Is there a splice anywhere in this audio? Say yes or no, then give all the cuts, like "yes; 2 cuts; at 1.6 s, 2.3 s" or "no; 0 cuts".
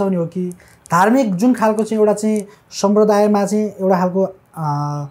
no; 0 cuts